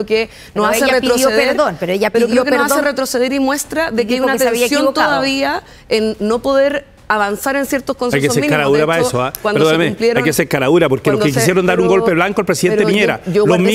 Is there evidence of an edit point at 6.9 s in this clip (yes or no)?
no